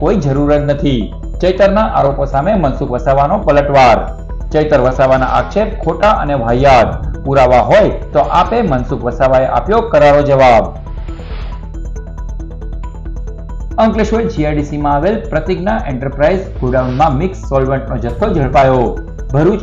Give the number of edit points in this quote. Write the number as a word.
zero